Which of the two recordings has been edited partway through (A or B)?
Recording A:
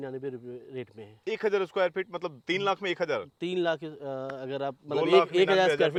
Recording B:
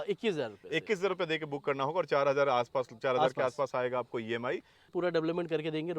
B